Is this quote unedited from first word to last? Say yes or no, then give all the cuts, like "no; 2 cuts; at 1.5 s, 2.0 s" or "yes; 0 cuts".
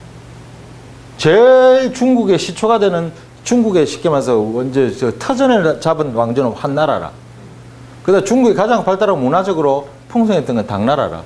no; 1 cut; at 9.5 s